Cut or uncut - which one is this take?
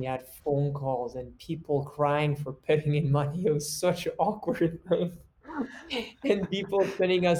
uncut